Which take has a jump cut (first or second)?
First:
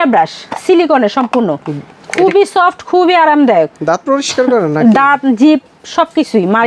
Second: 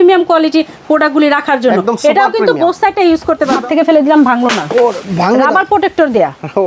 second